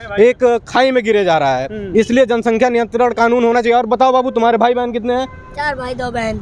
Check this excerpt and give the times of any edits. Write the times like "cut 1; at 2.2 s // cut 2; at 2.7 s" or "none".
none